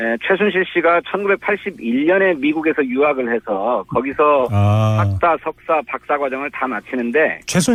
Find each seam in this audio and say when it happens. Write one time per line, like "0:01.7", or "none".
none